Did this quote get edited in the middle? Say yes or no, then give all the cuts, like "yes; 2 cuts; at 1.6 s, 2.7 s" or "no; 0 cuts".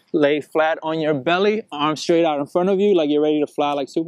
no; 0 cuts